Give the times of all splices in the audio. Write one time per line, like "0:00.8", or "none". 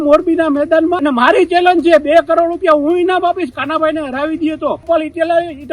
0:01.0
0:04.9